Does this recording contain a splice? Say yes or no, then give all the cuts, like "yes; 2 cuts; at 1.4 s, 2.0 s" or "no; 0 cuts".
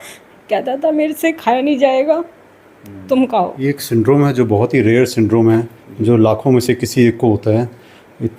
yes; 1 cut; at 3.5 s